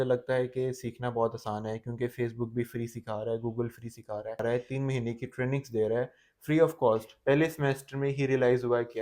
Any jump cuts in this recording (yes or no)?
yes